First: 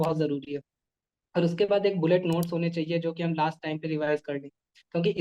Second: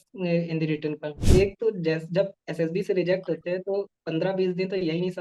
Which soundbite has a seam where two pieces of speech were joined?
second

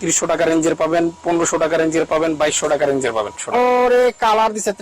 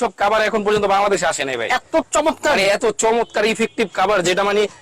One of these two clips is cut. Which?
first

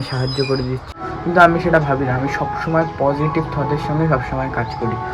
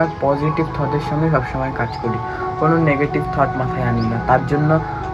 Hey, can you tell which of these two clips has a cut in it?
first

